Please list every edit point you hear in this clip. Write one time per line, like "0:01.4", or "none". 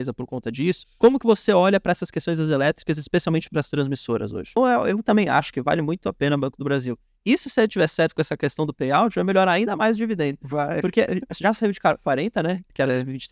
0:00.9
0:04.6